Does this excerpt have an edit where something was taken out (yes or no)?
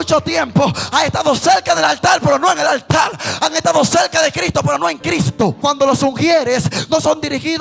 yes